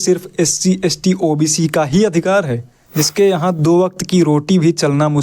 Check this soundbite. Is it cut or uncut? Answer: cut